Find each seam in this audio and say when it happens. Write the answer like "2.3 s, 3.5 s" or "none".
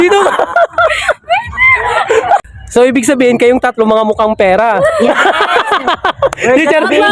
2.4 s